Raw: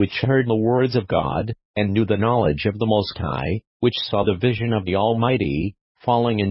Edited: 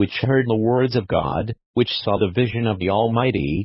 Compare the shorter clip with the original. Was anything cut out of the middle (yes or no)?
yes